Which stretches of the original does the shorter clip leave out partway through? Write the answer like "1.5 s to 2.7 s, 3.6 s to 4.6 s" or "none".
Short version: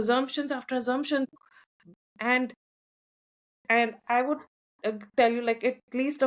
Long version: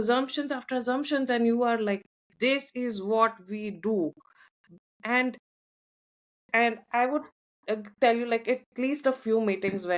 1.3 s to 4.1 s